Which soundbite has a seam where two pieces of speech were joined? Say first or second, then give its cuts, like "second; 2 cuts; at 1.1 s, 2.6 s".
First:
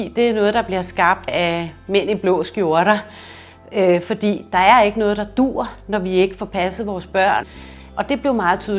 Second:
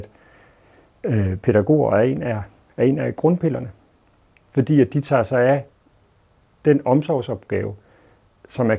first; 2 cuts; at 1.3 s, 7.5 s